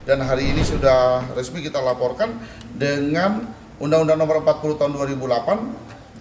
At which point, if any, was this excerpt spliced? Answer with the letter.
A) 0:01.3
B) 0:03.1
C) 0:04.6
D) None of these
D